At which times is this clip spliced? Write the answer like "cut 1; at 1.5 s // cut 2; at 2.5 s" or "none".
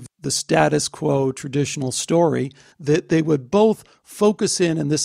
cut 1; at 2.7 s